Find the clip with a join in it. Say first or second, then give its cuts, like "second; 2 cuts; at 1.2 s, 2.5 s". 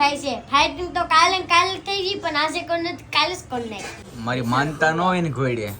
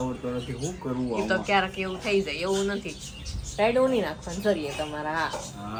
first; 1 cut; at 3.9 s